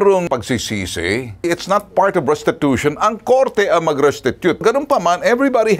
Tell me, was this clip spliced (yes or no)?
yes